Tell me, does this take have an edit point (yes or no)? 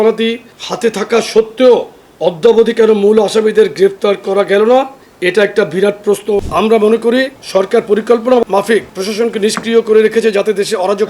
yes